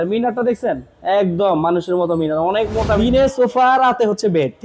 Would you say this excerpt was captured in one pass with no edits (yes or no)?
no